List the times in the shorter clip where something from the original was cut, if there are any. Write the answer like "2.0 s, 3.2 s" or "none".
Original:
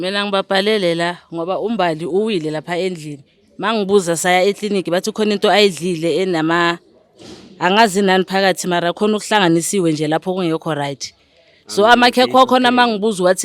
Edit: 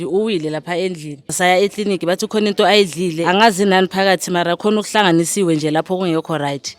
1.3 s, 3.2 s